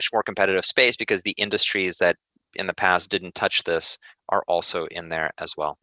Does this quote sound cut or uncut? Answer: uncut